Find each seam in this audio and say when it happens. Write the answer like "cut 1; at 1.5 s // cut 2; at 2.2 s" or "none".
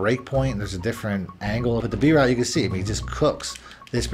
cut 1; at 1.8 s